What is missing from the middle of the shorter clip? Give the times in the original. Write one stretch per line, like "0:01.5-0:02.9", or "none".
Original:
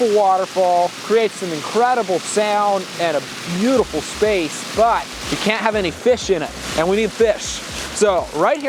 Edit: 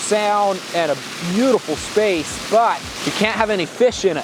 none